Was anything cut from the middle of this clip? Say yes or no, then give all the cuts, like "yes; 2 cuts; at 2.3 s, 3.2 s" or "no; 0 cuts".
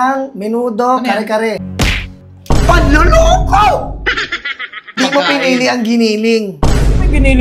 yes; 2 cuts; at 1.7 s, 5.0 s